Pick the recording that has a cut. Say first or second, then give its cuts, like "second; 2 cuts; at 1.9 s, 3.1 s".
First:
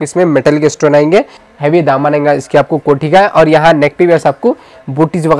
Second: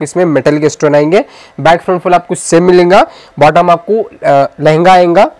first; 1 cut; at 1.4 s